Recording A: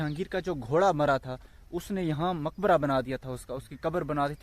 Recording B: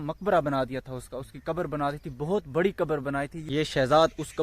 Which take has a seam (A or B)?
B